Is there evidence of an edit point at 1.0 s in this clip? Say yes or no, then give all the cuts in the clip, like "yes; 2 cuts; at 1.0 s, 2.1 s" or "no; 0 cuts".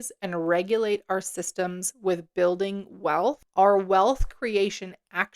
no; 1 cut; at 3.4 s